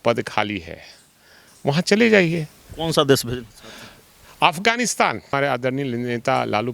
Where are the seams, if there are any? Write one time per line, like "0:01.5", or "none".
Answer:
0:05.3